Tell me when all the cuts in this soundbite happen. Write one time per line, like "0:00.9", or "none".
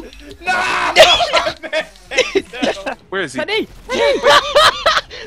0:03.0